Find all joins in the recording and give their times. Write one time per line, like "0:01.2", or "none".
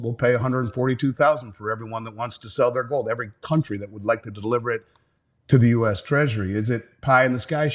none